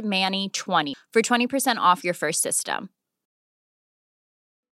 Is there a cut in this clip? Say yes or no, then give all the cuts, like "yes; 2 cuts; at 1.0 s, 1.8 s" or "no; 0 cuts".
yes; 1 cut; at 0.9 s